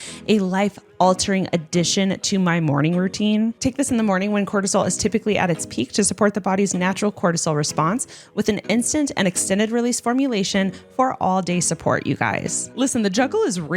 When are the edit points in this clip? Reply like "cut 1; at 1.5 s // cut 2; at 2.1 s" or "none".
cut 1; at 3.6 s